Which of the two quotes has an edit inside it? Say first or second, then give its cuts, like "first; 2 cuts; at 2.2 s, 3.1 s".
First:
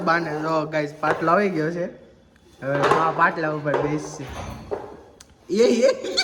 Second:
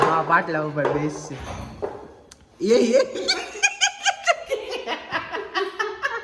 second; 1 cut; at 4.4 s